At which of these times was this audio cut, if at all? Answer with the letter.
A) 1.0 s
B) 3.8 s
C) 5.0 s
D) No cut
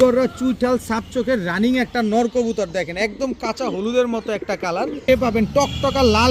C